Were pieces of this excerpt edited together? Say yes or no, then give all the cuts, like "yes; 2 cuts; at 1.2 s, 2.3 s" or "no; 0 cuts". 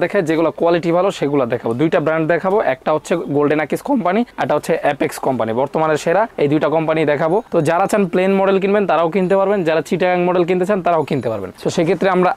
no; 0 cuts